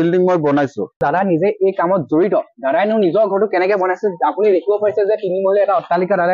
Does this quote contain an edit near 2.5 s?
no; 1 cut; at 1.0 s

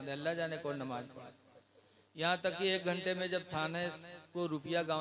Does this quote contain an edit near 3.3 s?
no; 0 cuts

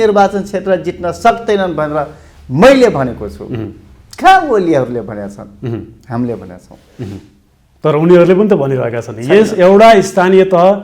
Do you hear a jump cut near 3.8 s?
no; 0 cuts

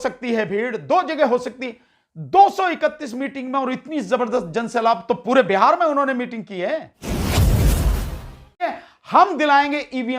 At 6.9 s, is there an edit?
yes; 2 cuts; at 6.9 s, 8.7 s

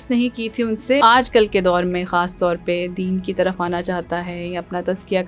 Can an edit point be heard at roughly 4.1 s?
no; 1 cut; at 1.0 s

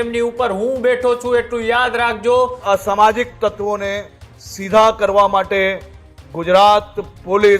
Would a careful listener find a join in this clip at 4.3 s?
no; 1 cut; at 2.6 s

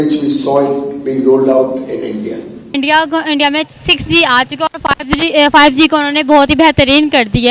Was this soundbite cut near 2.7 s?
yes; 1 cut; at 2.7 s

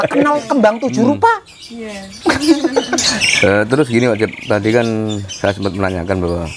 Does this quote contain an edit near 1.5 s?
no; 1 cut; at 3.1 s

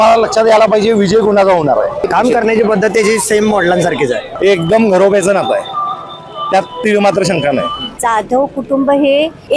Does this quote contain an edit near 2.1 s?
yes; 3 cuts; at 2.1 s, 4.3 s, 8.0 s

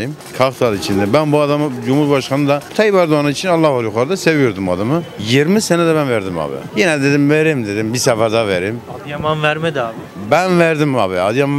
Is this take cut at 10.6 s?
no; 0 cuts

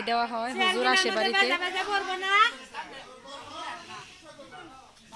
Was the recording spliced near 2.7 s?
no; 0 cuts

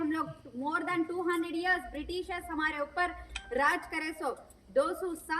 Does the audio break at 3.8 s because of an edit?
no; 0 cuts

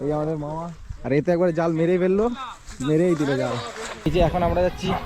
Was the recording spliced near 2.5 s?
no; 1 cut; at 4.1 s

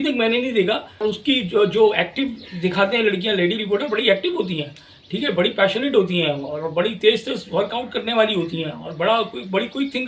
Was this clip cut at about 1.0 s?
yes; 1 cut; at 1.0 s

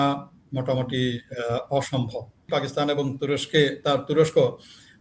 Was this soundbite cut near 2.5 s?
yes; 1 cut; at 2.5 s

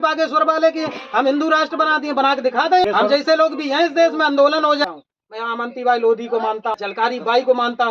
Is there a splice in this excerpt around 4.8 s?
yes; 3 cuts; at 2.8 s, 4.8 s, 6.8 s

